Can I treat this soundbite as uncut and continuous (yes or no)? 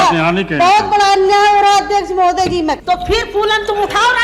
no